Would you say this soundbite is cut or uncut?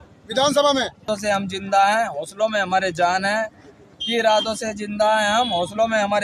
cut